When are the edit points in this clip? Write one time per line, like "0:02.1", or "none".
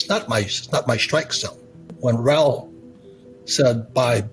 0:01.9